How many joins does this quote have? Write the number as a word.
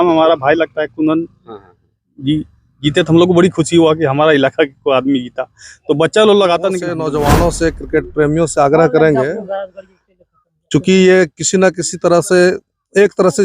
one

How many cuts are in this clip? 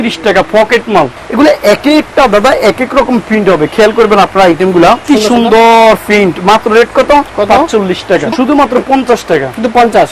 three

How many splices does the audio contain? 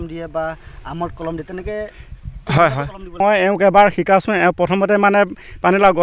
one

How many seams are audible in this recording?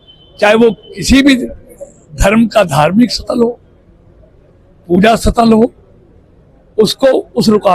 zero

